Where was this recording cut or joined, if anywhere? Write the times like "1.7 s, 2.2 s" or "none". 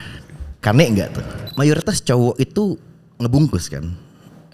1.1 s

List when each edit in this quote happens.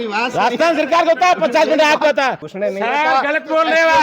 2.4 s

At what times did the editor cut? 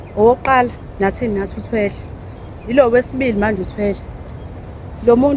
none

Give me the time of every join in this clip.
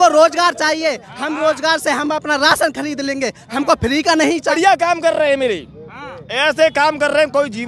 4.5 s

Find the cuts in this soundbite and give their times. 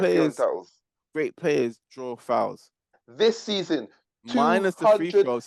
2.8 s

